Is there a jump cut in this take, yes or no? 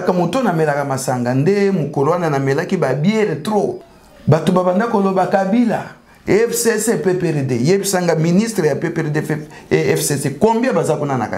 yes